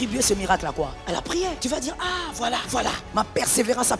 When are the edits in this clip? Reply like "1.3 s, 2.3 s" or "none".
1.2 s, 2.7 s

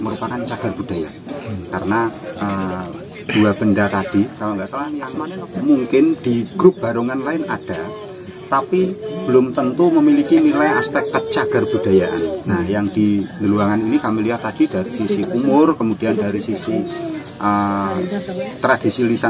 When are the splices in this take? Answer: 5.1 s

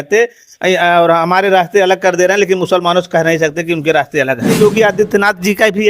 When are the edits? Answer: 4.6 s

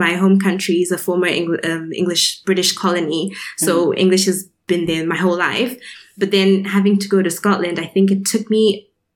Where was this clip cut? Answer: 4.5 s

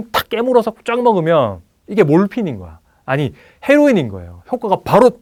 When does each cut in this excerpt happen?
none

